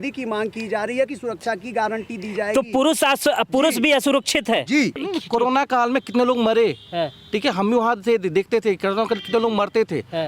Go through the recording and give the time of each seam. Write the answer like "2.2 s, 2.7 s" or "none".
5.0 s